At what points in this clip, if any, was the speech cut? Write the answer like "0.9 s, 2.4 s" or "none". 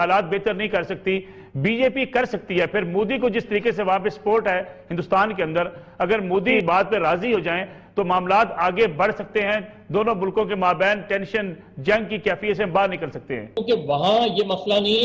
6.6 s, 13.5 s